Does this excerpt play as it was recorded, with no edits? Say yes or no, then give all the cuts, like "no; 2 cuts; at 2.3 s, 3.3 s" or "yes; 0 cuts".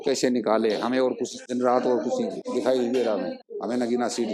no; 3 cuts; at 1.4 s, 2.4 s, 3.4 s